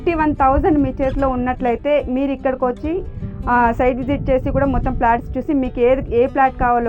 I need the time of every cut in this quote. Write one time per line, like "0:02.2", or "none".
none